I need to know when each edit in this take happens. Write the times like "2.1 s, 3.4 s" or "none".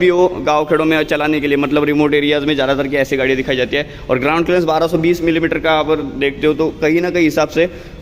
none